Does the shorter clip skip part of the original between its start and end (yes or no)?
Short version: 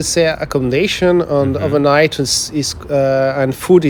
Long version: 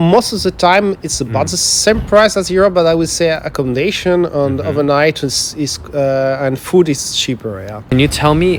no